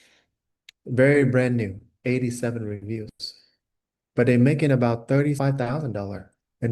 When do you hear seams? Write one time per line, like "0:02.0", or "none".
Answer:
0:01.8
0:05.4